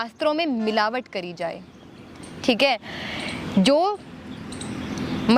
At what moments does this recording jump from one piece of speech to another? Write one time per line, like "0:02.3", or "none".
none